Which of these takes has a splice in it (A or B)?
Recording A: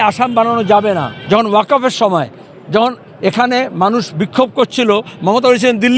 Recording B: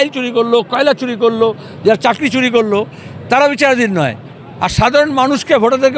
A